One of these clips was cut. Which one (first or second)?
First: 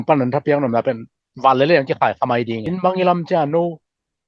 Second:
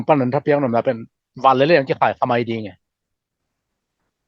first